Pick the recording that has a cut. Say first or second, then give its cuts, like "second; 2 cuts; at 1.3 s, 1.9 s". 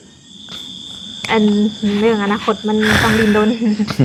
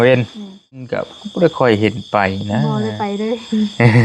second; 1 cut; at 1.2 s